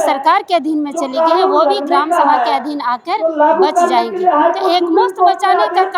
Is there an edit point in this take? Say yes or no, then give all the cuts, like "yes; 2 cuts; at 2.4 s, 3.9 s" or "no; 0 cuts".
no; 0 cuts